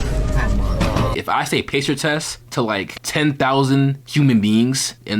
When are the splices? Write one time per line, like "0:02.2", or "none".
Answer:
0:01.2